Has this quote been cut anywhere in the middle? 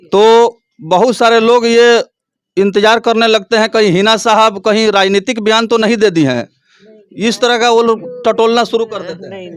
no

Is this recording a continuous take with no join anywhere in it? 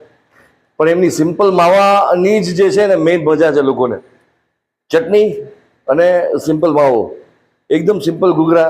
yes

